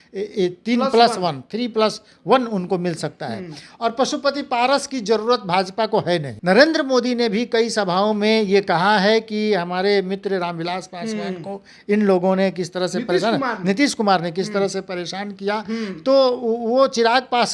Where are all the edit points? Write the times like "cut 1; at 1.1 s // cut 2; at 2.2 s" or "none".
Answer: cut 1; at 1.4 s // cut 2; at 6.3 s